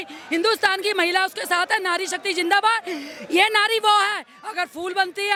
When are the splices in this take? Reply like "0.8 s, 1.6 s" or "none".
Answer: none